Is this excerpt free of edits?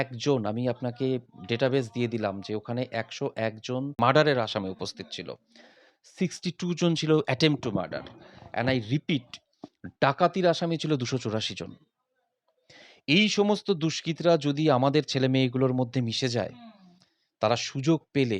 no; 1 cut; at 4.0 s

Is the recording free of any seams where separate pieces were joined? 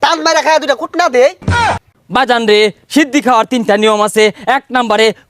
no; 1 cut; at 1.7 s

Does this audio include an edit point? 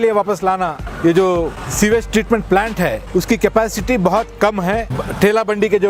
yes; 4 cuts; at 0.9 s, 1.6 s, 3.0 s, 5.0 s

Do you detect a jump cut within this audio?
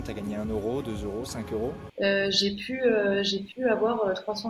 yes; 1 cut; at 1.8 s

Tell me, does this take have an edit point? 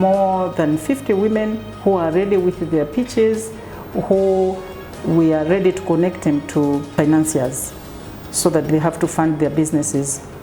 yes; 1 cut; at 6.9 s

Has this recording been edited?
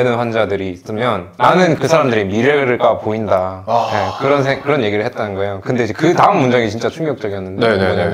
no; 0 cuts

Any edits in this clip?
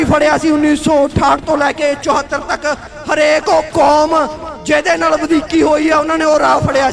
no; 0 cuts

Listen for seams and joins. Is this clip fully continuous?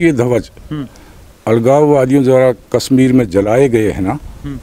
yes; 0 cuts

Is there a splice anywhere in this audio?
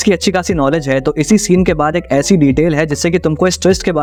no; 0 cuts

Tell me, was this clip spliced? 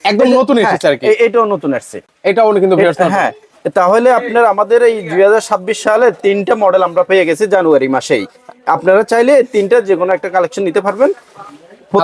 no; 0 cuts

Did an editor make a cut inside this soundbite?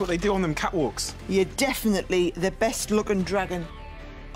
yes; 1 cut; at 1.1 s

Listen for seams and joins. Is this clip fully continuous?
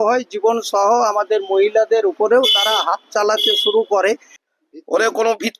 no; 1 cut; at 4.3 s

